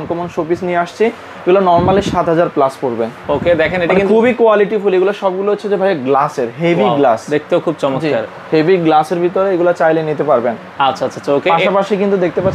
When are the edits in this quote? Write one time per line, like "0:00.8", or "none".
none